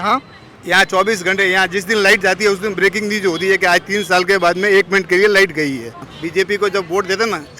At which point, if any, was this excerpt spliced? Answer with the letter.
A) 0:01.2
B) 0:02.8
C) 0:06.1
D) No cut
C